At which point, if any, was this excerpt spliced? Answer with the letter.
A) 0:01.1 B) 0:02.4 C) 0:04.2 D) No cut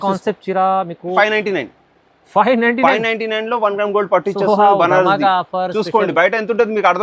A